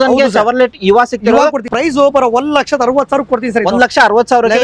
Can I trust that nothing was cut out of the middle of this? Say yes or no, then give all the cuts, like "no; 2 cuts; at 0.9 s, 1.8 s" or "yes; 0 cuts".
no; 1 cut; at 1.6 s